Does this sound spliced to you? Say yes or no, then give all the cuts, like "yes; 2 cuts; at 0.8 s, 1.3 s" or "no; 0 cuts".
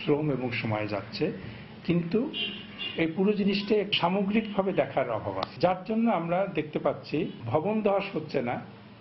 no; 0 cuts